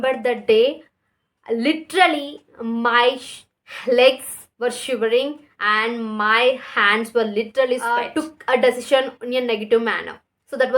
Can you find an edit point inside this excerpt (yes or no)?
yes